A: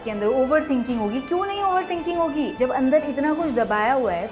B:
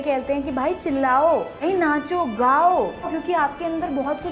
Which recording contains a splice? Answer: B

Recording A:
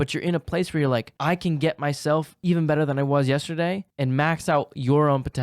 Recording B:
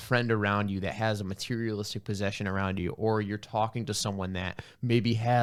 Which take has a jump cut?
A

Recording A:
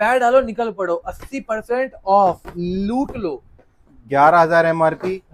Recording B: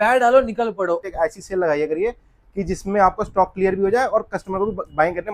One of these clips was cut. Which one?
B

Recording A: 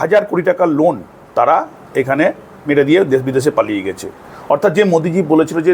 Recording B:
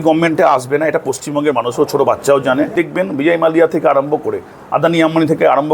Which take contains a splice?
B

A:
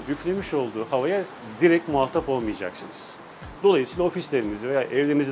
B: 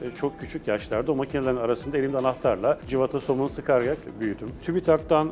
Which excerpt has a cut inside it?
B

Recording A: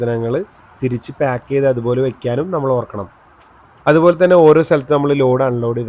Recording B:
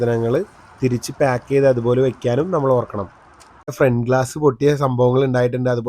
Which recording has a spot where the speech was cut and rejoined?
B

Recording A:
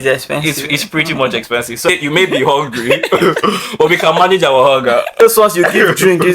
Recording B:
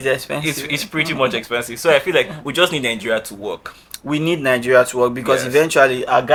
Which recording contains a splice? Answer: A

